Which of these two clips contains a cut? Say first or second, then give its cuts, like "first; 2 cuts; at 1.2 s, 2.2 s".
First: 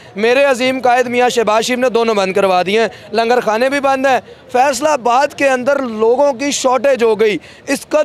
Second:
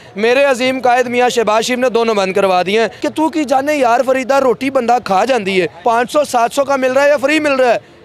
second; 2 cuts; at 3.0 s, 5.7 s